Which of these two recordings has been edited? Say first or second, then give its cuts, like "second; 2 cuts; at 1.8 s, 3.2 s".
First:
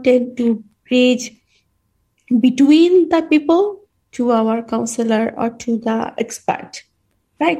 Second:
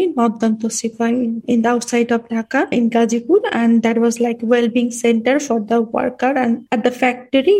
second; 3 cuts; at 1.4 s, 2.7 s, 6.6 s